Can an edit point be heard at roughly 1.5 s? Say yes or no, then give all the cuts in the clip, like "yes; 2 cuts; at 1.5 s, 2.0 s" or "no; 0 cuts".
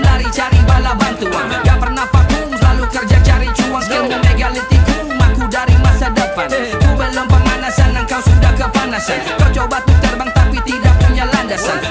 no; 0 cuts